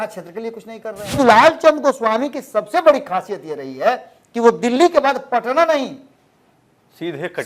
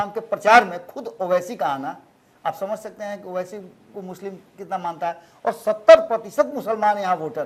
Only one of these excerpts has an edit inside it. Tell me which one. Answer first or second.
first